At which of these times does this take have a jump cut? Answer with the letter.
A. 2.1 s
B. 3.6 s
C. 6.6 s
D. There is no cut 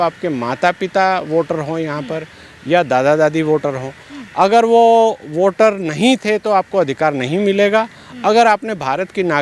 D